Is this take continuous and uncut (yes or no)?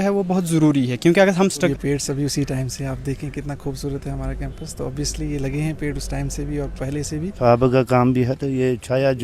no